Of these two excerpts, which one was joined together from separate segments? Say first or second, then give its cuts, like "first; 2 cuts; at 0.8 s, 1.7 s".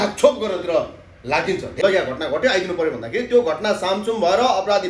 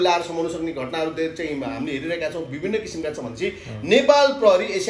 first; 1 cut; at 1.7 s